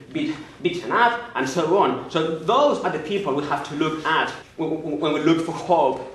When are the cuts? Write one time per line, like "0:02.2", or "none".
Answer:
0:04.4